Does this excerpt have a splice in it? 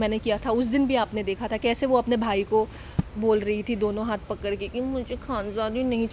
no; 0 cuts

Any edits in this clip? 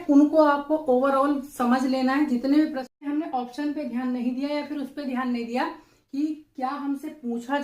yes; 1 cut; at 2.9 s

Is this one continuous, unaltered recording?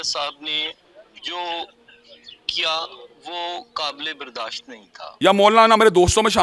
no; 1 cut; at 5.0 s

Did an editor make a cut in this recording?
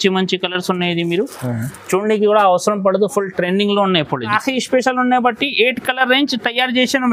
yes; 1 cut; at 4.4 s

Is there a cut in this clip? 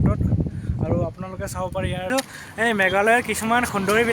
yes; 1 cut; at 2.1 s

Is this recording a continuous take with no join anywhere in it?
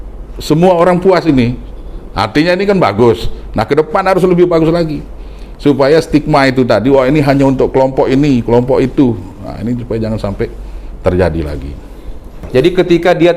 no; 1 cut; at 12.5 s

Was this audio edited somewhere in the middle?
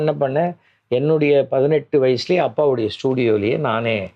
no; 0 cuts

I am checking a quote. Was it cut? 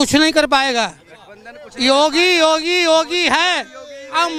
no; 0 cuts

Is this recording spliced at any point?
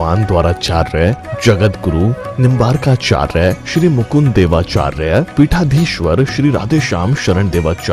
yes; 1 cut; at 5.7 s

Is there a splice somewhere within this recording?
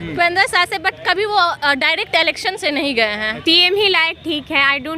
yes; 1 cut; at 3.4 s

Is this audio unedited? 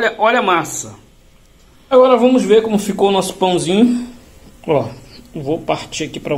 no; 1 cut; at 1.9 s

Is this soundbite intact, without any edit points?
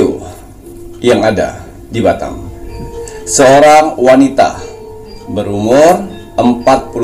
no; 1 cut; at 3.1 s

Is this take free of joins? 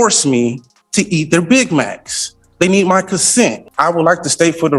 no; 1 cut; at 3.7 s

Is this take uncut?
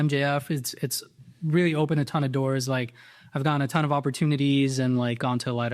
yes; 0 cuts

